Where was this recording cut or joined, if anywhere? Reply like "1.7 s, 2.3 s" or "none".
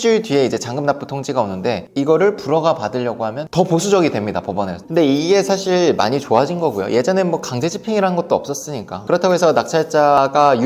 1.9 s, 3.4 s, 4.8 s